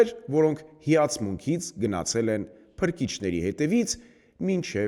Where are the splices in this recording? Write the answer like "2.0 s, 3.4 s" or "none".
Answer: none